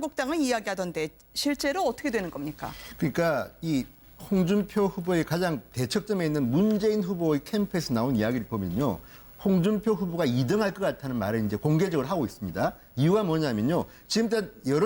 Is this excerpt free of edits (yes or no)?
yes